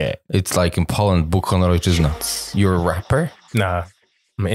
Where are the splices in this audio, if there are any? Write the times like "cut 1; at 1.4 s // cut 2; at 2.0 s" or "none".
cut 1; at 2.2 s // cut 2; at 3.4 s

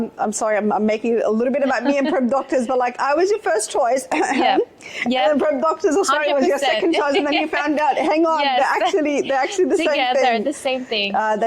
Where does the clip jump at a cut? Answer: none

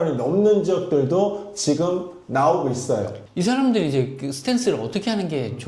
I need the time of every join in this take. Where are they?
cut 1; at 3.2 s

